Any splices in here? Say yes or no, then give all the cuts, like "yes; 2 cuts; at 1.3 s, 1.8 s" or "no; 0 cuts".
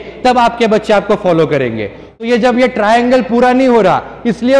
yes; 1 cut; at 2.0 s